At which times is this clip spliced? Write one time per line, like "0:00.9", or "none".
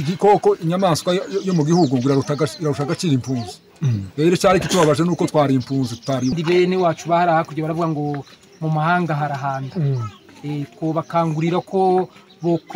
0:06.3